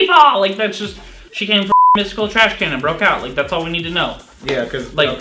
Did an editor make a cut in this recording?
yes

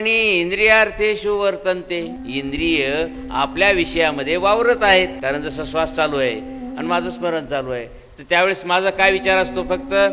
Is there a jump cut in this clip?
yes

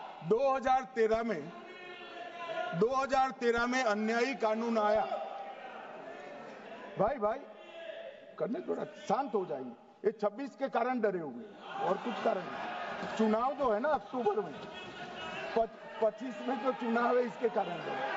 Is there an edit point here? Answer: no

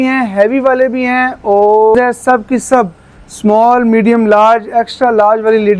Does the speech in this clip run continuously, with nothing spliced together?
no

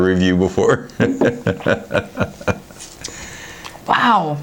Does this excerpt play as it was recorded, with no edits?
yes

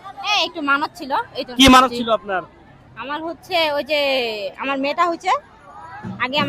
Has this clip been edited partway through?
no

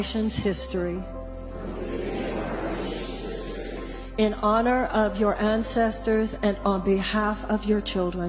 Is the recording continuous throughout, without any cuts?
yes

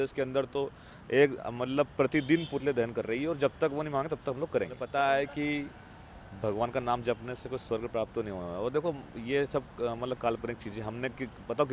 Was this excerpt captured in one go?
no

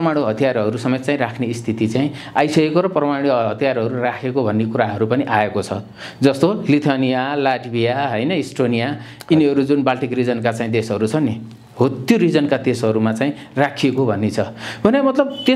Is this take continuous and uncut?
yes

